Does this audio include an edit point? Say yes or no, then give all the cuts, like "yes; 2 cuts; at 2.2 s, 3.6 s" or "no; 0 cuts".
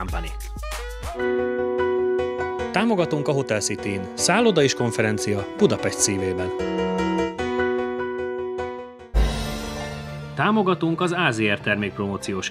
no; 0 cuts